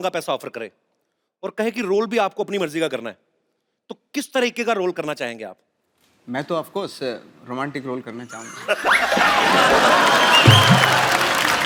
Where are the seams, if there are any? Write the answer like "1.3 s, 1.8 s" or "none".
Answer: none